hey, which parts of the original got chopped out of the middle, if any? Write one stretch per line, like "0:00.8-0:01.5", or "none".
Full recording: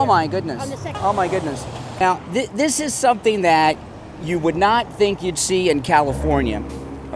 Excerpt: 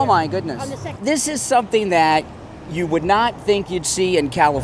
0:01.0-0:02.5